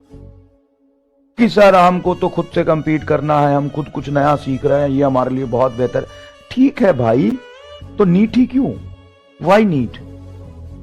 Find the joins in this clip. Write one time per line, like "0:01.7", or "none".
0:01.4